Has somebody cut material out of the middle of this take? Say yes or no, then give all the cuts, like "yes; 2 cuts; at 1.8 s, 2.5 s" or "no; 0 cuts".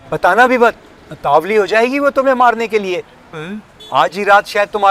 no; 0 cuts